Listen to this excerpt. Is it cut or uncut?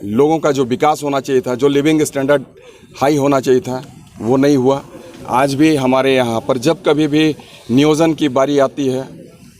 cut